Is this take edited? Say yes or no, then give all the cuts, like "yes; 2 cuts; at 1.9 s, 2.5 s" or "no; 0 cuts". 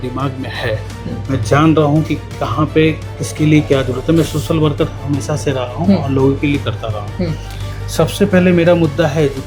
no; 0 cuts